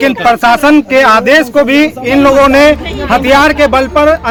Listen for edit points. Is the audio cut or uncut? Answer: uncut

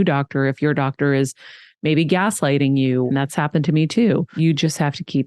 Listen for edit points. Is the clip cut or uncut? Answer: cut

